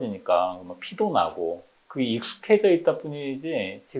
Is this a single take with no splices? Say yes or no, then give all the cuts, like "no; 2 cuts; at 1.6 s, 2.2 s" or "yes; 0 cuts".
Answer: yes; 0 cuts